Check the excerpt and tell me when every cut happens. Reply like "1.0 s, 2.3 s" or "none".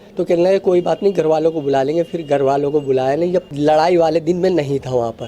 3.5 s